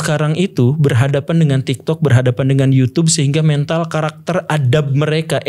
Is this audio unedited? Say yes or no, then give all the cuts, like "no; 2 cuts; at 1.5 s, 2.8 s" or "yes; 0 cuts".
yes; 0 cuts